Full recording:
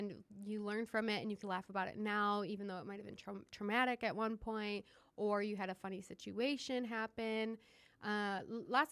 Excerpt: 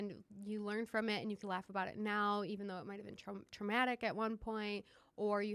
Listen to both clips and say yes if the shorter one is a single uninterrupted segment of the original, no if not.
yes